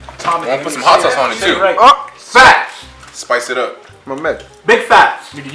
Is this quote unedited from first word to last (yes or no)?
yes